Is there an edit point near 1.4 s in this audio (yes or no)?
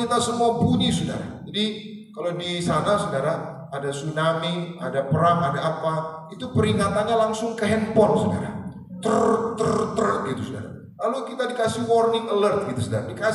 no